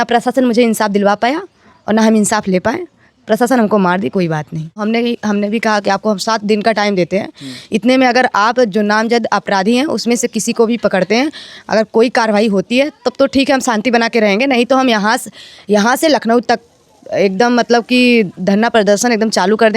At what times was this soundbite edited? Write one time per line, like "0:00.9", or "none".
0:04.8